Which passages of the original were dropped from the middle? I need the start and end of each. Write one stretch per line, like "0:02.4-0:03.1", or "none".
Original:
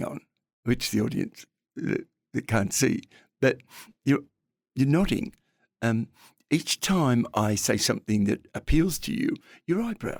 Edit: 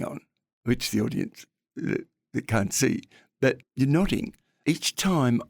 0:03.7-0:04.6
0:05.4-0:06.3